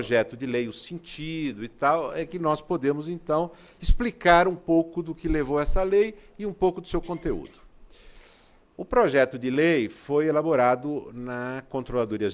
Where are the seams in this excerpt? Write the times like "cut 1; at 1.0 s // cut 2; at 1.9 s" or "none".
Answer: cut 1; at 2.9 s